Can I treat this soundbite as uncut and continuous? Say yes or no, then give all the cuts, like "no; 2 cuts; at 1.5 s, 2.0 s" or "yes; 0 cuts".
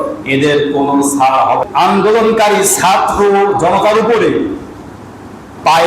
no; 1 cut; at 1.6 s